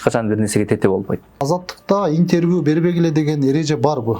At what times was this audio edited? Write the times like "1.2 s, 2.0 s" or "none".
1.4 s